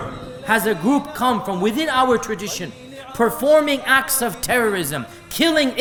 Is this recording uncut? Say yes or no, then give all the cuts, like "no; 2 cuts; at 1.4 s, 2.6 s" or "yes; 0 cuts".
yes; 0 cuts